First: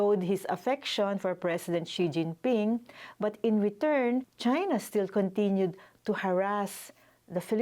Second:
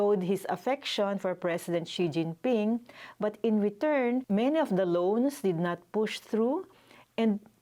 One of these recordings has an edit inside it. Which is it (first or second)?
first